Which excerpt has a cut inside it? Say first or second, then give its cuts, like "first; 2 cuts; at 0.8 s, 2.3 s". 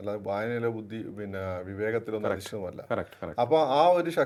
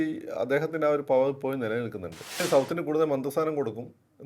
second; 1 cut; at 2.4 s